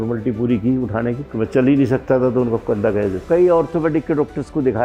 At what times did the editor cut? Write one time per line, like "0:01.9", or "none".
0:01.2
0:03.2